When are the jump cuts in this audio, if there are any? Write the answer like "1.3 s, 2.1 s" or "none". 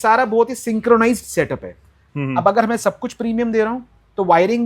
2.0 s